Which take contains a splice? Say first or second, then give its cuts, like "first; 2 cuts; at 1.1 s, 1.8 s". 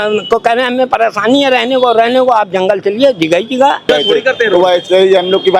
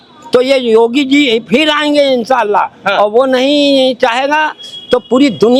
first; 1 cut; at 3.9 s